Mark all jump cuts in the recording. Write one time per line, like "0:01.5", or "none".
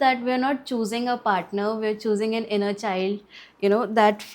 none